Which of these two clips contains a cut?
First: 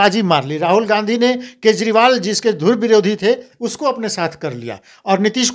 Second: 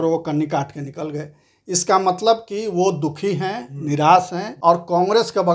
second; 1 cut; at 4.4 s

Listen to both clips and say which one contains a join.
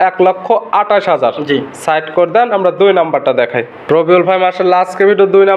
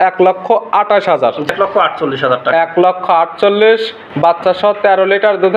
second; 1 cut; at 1.5 s

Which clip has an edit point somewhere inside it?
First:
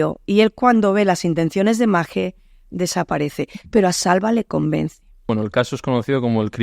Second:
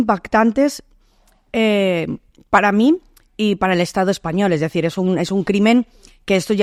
first; 1 cut; at 5.2 s

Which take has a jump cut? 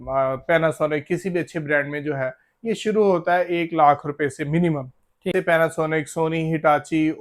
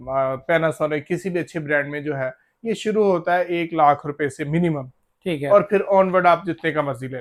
first; 1 cut; at 5.3 s

